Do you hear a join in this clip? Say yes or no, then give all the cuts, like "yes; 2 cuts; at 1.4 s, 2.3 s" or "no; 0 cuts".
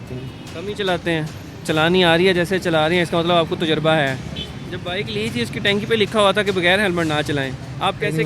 no; 0 cuts